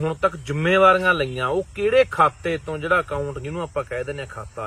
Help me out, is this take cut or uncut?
uncut